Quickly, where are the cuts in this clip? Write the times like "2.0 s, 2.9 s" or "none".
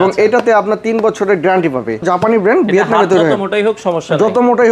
2.0 s